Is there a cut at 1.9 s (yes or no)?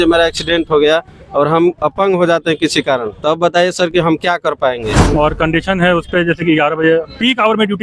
no